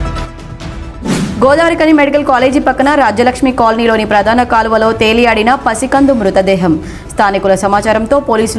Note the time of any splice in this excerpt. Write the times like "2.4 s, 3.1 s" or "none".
none